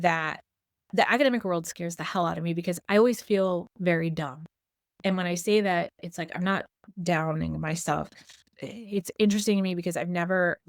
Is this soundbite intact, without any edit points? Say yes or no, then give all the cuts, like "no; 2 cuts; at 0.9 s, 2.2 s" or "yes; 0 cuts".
no; 1 cut; at 8.4 s